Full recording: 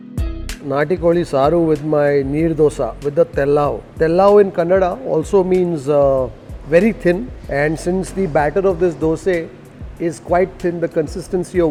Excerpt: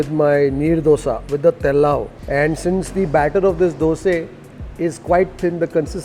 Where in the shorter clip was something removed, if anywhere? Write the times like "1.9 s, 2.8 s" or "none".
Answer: 2.1 s